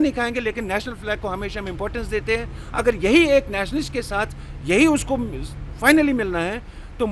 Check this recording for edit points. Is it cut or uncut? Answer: uncut